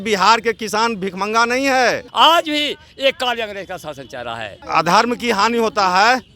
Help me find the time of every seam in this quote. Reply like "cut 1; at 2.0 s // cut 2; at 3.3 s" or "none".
cut 1; at 2.0 s // cut 2; at 4.5 s